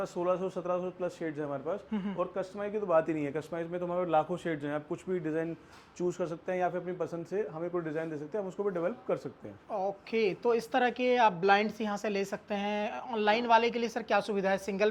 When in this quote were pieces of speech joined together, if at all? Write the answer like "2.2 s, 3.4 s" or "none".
none